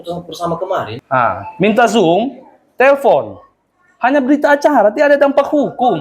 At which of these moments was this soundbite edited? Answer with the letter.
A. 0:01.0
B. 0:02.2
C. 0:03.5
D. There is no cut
A